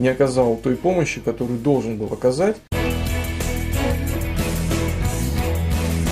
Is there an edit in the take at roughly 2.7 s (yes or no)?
yes